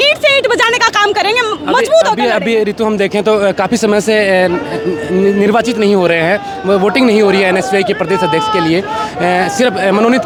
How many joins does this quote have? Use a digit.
0